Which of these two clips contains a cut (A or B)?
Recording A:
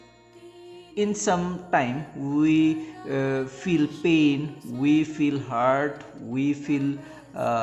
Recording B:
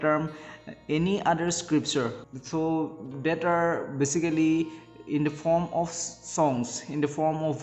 B